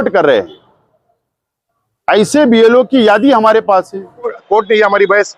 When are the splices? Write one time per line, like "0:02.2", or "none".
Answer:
0:04.4